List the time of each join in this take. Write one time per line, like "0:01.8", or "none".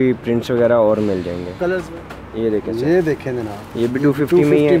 0:01.8